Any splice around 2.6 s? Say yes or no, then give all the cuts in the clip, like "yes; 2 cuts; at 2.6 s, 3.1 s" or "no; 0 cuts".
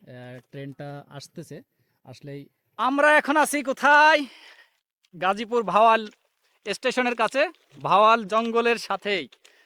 yes; 1 cut; at 2.6 s